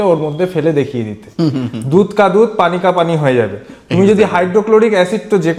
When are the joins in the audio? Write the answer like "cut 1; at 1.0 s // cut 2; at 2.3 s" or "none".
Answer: none